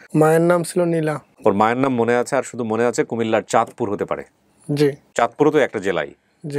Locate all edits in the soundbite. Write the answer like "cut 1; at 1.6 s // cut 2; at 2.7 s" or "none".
cut 1; at 1.3 s // cut 2; at 5.1 s

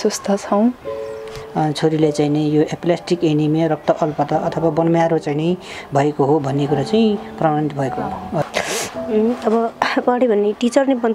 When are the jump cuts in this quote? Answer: cut 1; at 1.3 s // cut 2; at 8.4 s

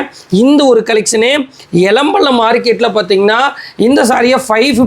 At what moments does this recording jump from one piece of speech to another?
none

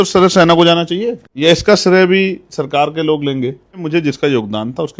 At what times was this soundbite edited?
cut 1; at 1.2 s // cut 2; at 3.8 s

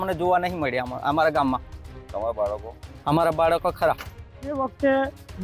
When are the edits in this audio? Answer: none

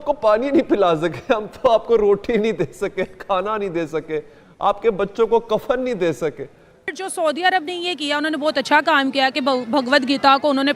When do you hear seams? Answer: cut 1; at 6.9 s

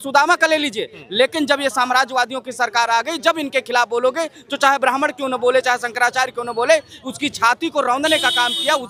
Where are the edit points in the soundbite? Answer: none

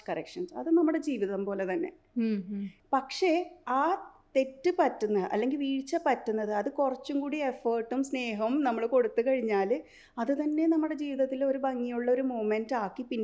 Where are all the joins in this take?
cut 1; at 2.8 s

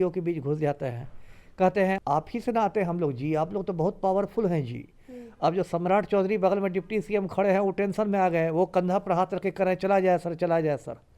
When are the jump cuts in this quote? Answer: cut 1; at 2.0 s

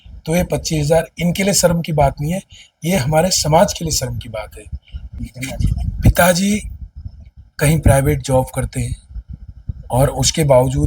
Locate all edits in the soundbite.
cut 1; at 5.1 s

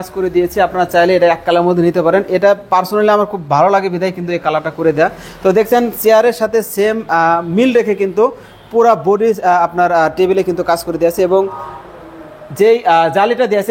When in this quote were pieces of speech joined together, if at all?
none

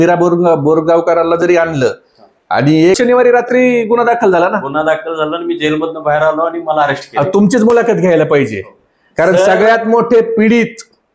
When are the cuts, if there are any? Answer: cut 1; at 3.0 s

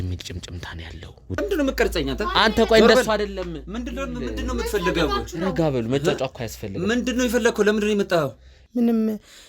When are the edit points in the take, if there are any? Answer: cut 1; at 1.4 s // cut 2; at 8.5 s

